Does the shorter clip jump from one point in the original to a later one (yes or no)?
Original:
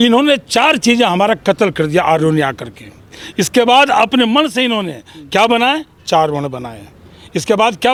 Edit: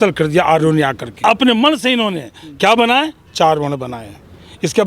yes